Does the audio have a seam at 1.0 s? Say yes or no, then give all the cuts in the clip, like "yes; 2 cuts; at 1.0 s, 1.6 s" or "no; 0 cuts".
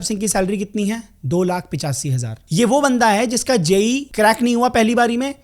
no; 2 cuts; at 2.3 s, 4.1 s